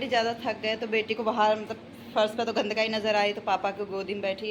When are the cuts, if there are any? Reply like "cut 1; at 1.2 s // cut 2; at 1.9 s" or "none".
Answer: none

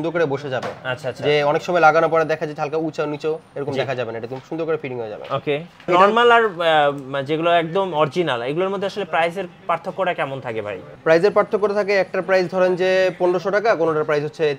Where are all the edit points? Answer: cut 1; at 5.9 s

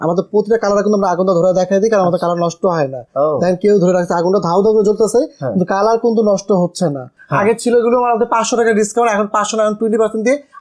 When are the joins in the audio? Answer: cut 1; at 7.1 s

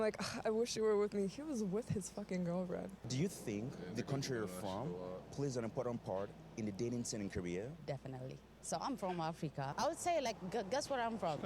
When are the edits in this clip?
cut 1; at 3.0 s // cut 2; at 9.7 s

